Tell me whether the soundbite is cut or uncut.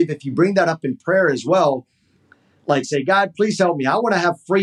uncut